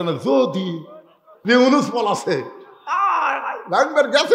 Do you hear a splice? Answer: yes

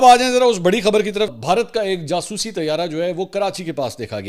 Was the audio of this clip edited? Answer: yes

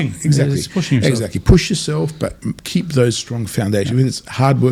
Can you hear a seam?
no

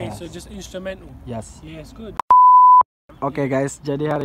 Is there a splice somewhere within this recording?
yes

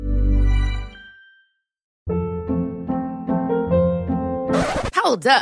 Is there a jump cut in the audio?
yes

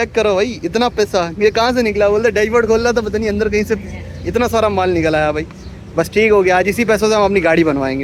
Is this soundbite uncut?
yes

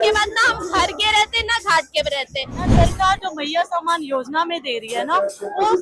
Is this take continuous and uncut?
no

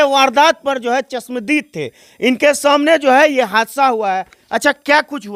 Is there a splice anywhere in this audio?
no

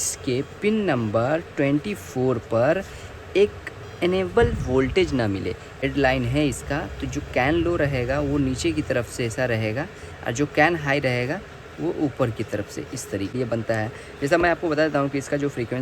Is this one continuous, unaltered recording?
no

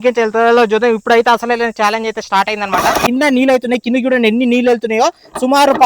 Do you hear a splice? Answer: yes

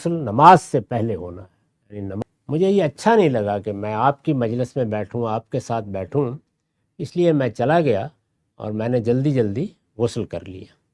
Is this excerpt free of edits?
no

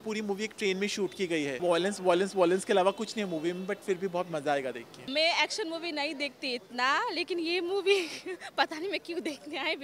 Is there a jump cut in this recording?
yes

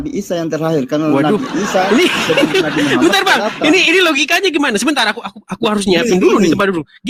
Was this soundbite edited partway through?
no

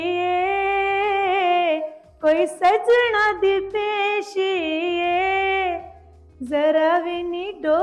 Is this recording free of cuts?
yes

